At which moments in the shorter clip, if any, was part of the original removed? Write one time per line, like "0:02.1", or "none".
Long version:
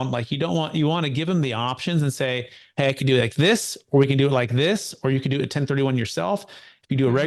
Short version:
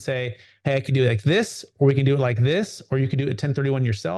none